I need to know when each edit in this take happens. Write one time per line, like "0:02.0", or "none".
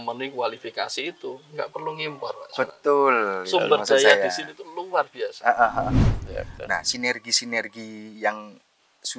0:05.9